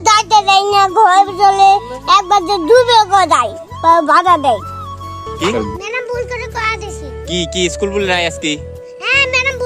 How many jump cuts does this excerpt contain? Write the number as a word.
one